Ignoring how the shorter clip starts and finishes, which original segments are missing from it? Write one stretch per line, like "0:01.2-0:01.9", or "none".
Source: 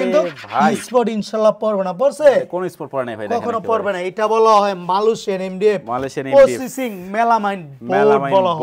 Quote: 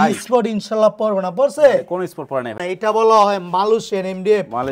0:03.2-0:03.9